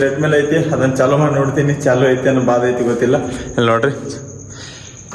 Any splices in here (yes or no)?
no